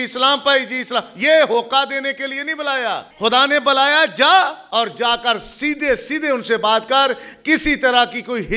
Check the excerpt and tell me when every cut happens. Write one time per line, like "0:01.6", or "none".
0:03.1
0:04.6